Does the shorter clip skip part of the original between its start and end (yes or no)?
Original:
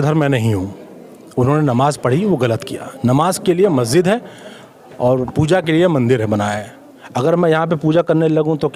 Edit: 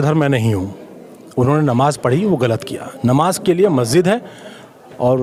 no